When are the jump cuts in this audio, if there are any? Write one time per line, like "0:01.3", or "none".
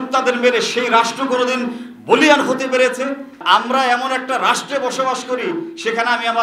0:03.4